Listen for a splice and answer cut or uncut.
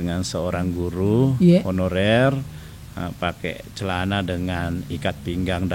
uncut